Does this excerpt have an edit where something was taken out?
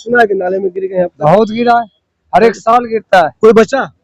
no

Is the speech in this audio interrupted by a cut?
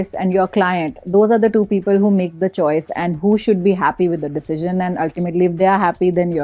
no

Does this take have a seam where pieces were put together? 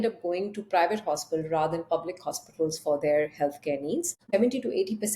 yes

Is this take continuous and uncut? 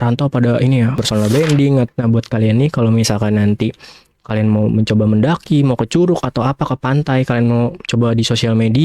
no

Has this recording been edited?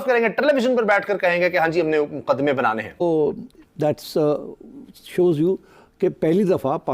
yes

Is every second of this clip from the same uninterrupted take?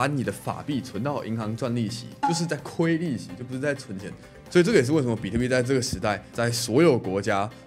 no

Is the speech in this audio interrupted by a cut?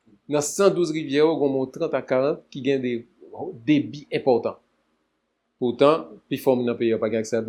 no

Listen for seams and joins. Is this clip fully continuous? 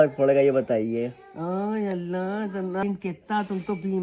no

